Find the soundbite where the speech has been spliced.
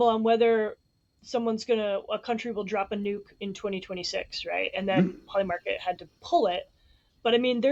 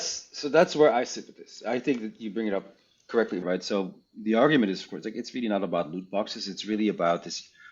second; 1 cut; at 3.4 s

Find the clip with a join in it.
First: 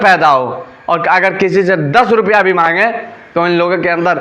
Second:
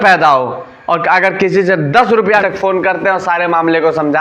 second; 1 cut; at 2.4 s

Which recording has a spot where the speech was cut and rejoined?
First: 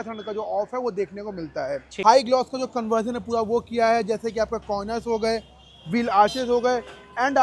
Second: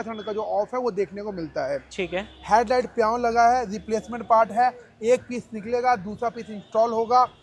first; 1 cut; at 1.8 s

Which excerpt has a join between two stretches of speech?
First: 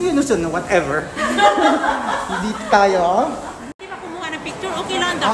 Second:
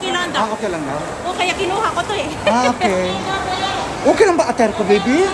first; 1 cut; at 3.8 s

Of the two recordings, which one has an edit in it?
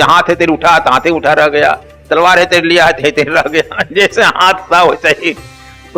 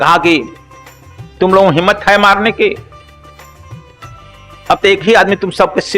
second; 2 cuts; at 2.8 s, 4.6 s

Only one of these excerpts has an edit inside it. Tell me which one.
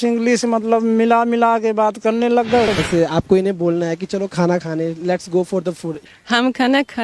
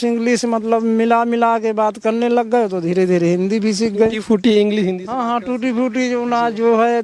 first; 2 cuts; at 2.7 s, 6.0 s

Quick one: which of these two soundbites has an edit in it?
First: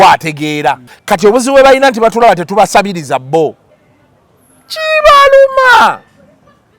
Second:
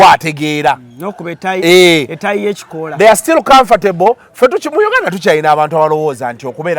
first; 1 cut; at 0.9 s

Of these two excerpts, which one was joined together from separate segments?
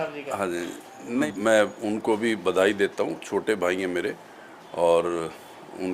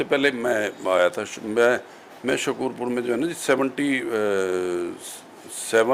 first; 1 cut; at 1.3 s

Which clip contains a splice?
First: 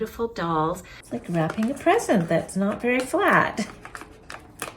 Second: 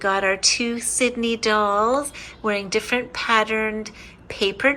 first; 1 cut; at 0.9 s

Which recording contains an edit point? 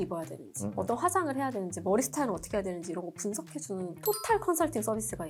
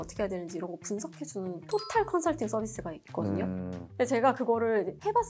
second; 1 cut; at 3.9 s

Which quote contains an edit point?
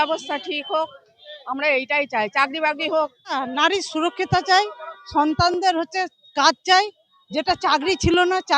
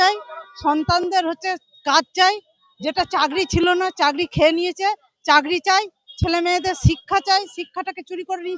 first; 1 cut; at 3.4 s

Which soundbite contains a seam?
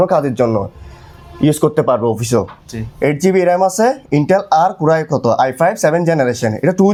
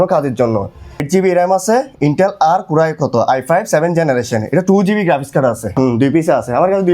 second; 2 cuts; at 1.0 s, 5.7 s

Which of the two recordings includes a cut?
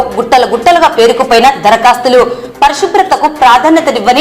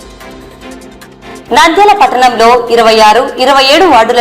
second; 1 cut; at 1.4 s

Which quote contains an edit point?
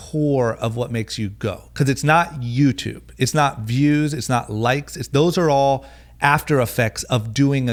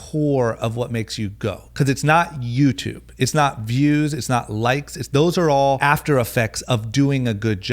second; 1 cut; at 5.8 s

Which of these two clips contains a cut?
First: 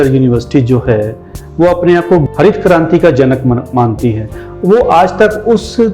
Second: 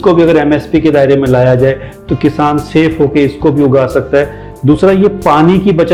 first; 1 cut; at 2.2 s

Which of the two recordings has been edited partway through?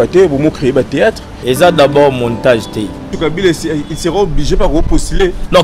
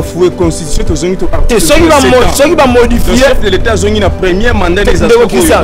first; 2 cuts; at 1.3 s, 3.1 s

